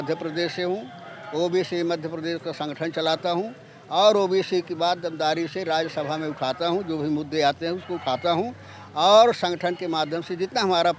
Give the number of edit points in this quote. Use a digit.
0